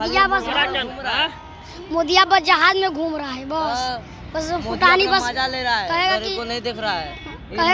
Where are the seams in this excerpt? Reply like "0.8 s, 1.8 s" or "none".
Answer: none